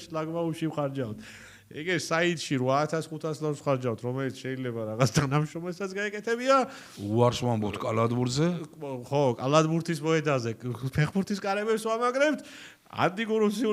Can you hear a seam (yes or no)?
no